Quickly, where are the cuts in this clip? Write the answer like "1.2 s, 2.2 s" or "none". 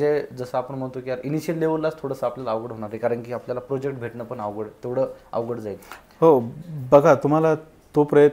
none